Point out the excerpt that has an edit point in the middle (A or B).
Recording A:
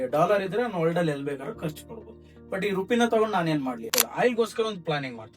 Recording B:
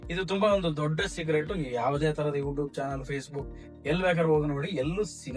A